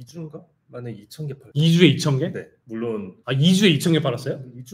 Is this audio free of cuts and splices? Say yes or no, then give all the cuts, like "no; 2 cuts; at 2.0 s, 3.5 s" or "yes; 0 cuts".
no; 2 cuts; at 1.4 s, 3.1 s